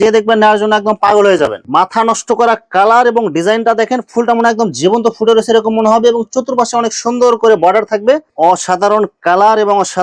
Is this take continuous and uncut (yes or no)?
no